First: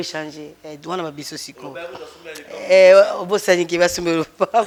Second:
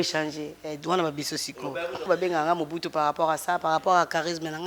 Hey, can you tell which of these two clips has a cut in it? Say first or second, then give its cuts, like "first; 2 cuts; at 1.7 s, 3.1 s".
second; 1 cut; at 2.1 s